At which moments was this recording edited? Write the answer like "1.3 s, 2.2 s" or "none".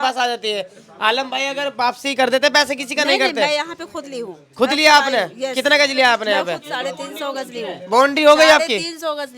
none